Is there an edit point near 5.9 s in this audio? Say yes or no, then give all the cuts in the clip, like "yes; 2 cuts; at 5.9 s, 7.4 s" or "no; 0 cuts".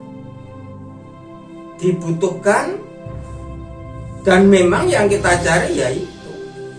no; 2 cuts; at 2.9 s, 4.2 s